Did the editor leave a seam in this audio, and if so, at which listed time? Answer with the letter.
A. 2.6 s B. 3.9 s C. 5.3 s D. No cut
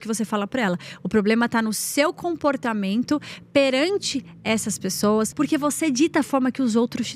C